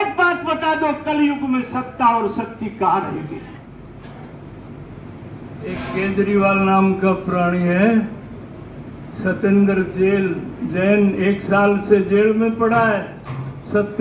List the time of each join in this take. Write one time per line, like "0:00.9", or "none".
0:03.6